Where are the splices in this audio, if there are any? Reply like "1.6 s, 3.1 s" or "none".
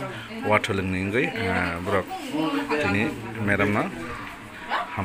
none